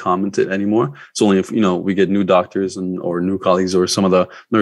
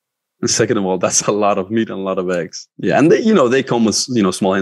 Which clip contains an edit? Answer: second; 1 cut; at 2.6 s

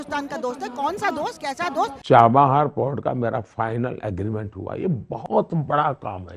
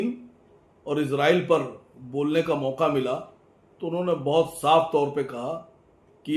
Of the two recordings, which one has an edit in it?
first; 1 cut; at 2.0 s

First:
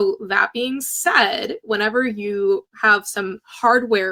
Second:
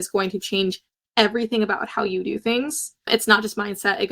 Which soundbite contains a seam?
second; 1 cut; at 3.1 s

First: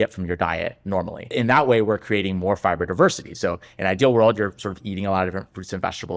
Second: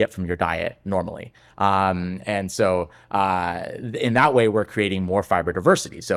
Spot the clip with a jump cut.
first; 1 cut; at 1.2 s

